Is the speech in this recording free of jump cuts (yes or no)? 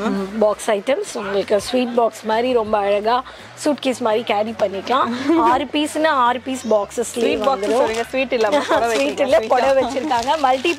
yes